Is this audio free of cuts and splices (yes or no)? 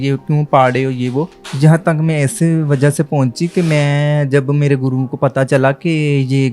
no